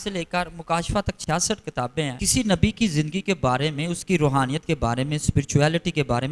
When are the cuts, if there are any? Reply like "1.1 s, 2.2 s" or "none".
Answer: 2.2 s